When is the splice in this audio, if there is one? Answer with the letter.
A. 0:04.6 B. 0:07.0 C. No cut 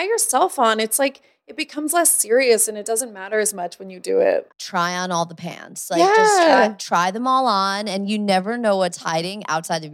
A